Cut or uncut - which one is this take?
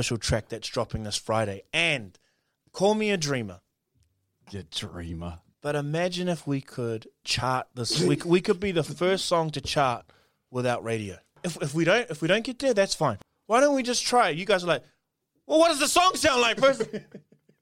cut